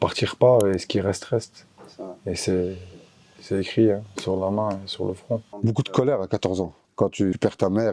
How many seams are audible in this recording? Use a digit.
2